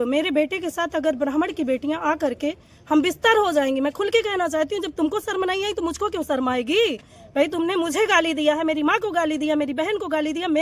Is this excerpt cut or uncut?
uncut